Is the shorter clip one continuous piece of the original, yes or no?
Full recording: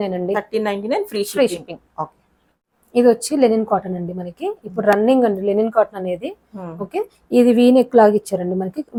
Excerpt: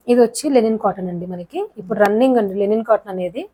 yes